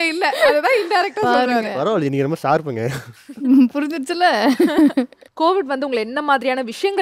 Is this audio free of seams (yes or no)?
no